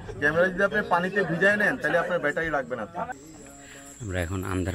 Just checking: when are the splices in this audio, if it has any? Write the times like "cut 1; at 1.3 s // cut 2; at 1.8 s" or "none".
cut 1; at 3.4 s